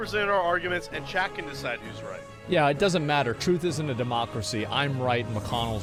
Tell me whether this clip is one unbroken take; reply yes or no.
yes